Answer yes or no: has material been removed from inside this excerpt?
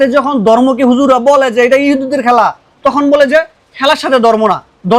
no